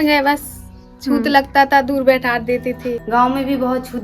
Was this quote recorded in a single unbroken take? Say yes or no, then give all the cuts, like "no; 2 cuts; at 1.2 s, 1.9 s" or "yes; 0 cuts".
no; 1 cut; at 2.9 s